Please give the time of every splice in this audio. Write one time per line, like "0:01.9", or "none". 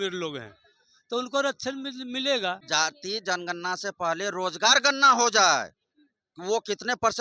0:02.6